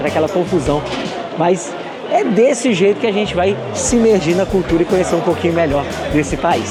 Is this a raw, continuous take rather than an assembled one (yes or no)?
yes